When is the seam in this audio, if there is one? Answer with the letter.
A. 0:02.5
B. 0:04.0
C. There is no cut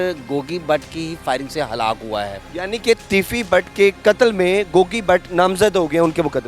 A